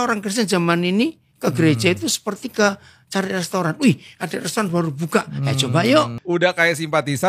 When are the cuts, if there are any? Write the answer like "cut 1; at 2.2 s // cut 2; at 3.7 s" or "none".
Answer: cut 1; at 6.2 s